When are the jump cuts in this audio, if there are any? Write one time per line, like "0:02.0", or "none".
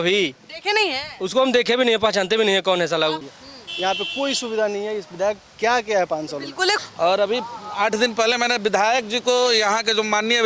0:03.3
0:06.8